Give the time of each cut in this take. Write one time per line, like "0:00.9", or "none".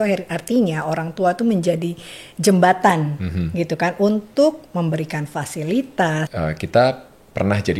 0:06.3